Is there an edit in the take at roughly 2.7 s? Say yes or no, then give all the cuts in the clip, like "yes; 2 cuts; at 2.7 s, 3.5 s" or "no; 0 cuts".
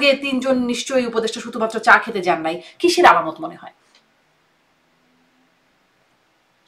no; 0 cuts